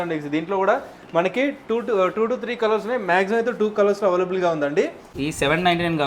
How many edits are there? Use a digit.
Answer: 1